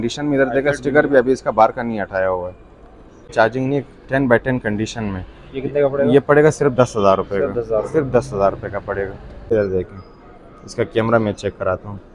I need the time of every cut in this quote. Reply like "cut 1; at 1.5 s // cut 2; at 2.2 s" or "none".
cut 1; at 3.3 s // cut 2; at 9.5 s